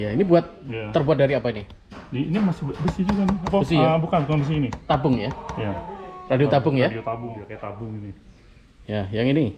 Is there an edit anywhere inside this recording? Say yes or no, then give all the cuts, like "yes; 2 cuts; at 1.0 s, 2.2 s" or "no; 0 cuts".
yes; 1 cut; at 7.5 s